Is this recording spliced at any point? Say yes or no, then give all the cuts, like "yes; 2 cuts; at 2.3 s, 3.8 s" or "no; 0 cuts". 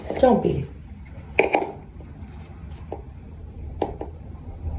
no; 0 cuts